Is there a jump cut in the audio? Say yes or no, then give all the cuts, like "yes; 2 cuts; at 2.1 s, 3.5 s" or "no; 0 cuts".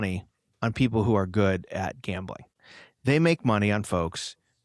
yes; 1 cut; at 2.4 s